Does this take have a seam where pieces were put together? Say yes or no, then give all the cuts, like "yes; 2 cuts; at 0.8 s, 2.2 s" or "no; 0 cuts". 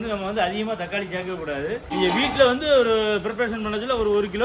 yes; 1 cut; at 1.8 s